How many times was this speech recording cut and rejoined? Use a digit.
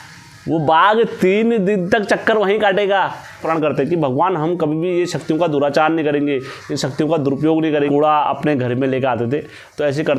2